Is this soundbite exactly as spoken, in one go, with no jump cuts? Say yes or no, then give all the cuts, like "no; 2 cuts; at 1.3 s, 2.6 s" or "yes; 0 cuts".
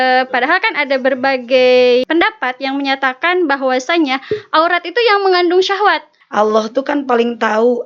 no; 2 cuts; at 2.1 s, 6.1 s